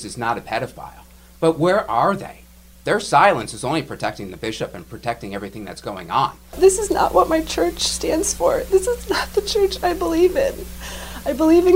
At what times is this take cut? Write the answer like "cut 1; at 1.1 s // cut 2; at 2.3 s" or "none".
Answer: cut 1; at 6.6 s